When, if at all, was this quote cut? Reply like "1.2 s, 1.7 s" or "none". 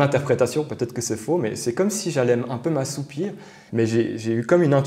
3.6 s